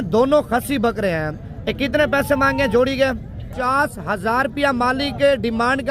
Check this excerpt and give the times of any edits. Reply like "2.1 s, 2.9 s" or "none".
3.5 s